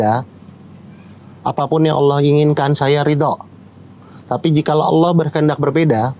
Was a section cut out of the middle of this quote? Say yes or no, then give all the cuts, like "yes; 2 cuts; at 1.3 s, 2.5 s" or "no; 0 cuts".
no; 0 cuts